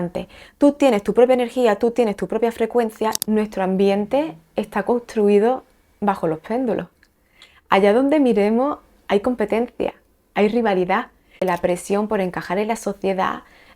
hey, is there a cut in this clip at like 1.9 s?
no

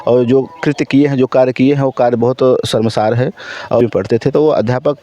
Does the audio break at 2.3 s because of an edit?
no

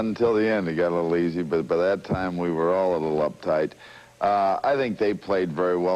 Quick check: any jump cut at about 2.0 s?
yes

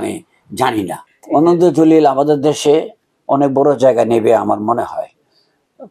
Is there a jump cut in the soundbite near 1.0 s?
yes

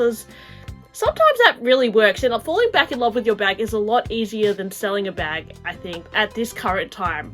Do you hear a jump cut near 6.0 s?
yes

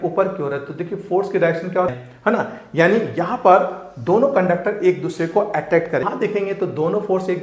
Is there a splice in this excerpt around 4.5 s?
no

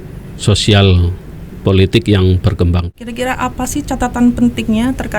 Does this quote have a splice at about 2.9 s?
yes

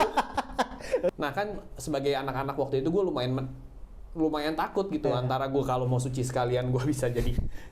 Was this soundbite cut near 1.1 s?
yes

